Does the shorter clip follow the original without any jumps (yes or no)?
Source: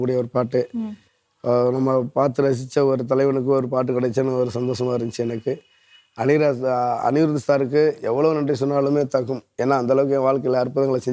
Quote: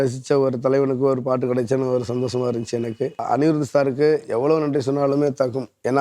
no